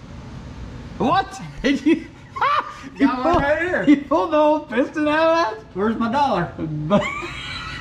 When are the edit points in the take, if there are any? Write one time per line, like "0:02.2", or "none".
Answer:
none